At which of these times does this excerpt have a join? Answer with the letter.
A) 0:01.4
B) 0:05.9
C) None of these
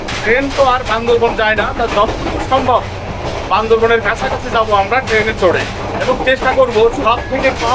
B